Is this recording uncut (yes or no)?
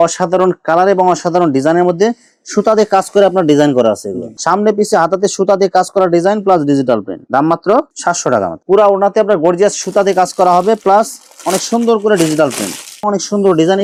yes